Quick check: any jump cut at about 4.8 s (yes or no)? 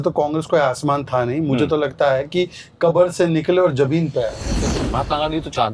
yes